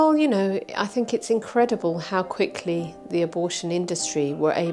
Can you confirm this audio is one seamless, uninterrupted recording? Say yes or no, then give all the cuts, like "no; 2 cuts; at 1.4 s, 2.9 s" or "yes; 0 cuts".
yes; 0 cuts